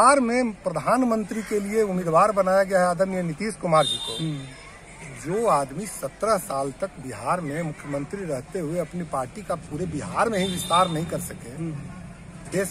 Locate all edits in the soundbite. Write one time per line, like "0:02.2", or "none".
none